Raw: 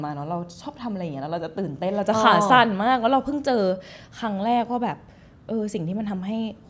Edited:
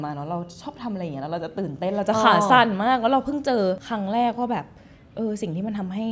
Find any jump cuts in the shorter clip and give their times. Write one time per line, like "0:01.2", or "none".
0:03.8